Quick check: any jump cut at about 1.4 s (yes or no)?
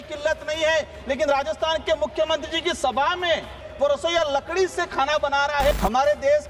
no